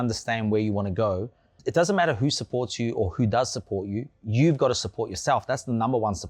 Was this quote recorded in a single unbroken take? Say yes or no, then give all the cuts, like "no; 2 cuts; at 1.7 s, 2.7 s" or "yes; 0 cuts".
no; 1 cut; at 1.5 s